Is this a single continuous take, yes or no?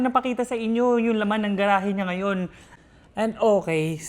no